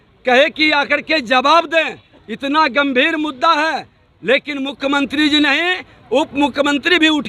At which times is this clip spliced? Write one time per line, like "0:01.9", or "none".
none